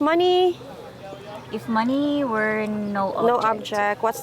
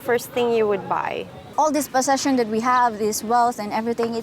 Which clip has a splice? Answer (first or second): second